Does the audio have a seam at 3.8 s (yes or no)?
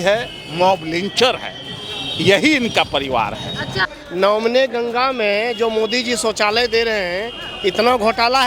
yes